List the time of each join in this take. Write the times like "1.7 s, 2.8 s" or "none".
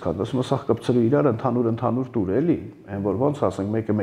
none